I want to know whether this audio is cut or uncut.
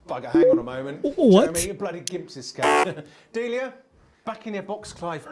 cut